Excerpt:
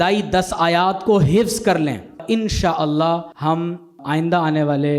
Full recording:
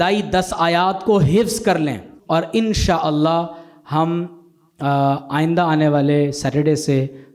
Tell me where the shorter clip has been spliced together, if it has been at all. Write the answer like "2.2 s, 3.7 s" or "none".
2.2 s, 3.8 s